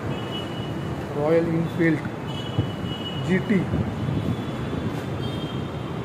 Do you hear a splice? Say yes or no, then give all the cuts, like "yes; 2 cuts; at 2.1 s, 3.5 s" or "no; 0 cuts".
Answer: no; 0 cuts